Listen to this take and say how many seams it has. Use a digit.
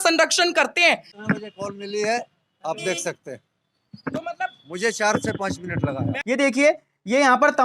2